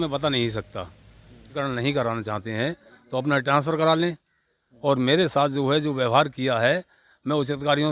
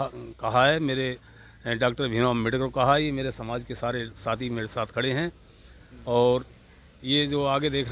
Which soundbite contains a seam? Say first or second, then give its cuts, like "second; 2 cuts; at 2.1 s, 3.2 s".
first; 1 cut; at 1.6 s